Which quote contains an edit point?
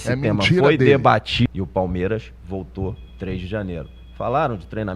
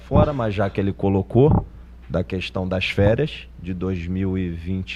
first; 1 cut; at 1.5 s

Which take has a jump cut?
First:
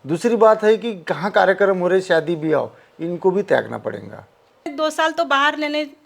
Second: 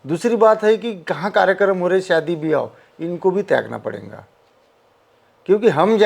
first; 1 cut; at 4.7 s

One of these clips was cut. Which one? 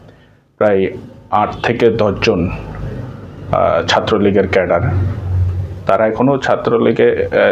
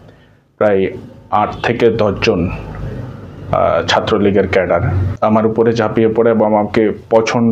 second; 1 cut; at 5.1 s

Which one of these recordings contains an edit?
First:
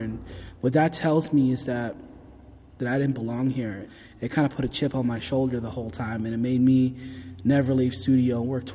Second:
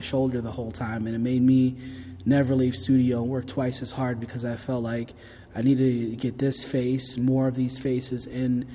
first; 2 cuts; at 2.8 s, 3.9 s

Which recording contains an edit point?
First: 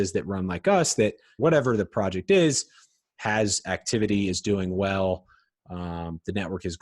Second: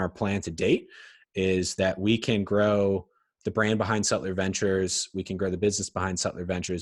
first; 1 cut; at 1.3 s

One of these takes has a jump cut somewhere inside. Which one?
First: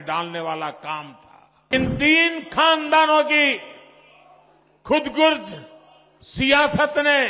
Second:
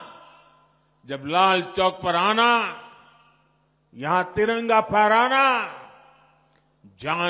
first; 1 cut; at 1.7 s

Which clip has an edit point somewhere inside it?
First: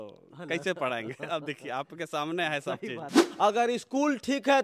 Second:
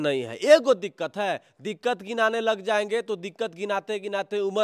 first; 1 cut; at 3.2 s

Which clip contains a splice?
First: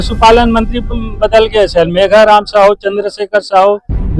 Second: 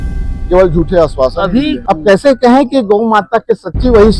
second; 1 cut; at 1.8 s

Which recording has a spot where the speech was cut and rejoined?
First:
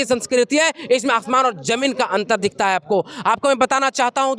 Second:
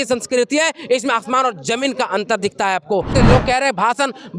second; 1 cut; at 3.1 s

